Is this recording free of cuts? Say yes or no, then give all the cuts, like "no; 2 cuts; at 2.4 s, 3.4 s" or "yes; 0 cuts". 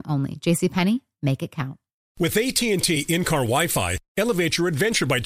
no; 1 cut; at 2.1 s